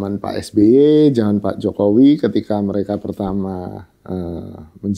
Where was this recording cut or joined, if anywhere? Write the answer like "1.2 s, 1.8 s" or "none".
none